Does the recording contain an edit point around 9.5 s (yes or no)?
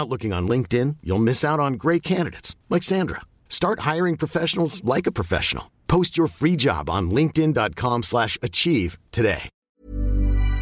yes